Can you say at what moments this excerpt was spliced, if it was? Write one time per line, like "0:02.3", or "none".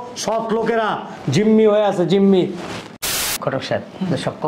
0:03.2

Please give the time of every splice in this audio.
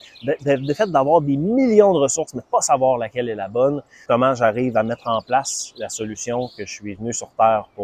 0:03.9

